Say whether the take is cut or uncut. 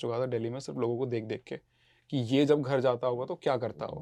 uncut